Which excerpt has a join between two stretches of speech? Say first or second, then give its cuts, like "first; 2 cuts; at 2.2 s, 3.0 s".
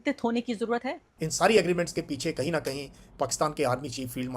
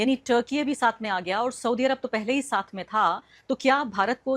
first; 1 cut; at 1.0 s